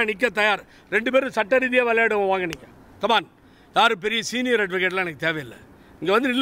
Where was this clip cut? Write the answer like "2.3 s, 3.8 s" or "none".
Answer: none